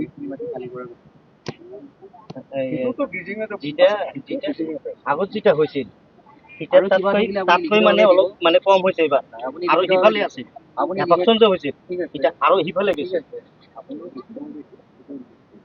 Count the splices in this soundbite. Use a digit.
0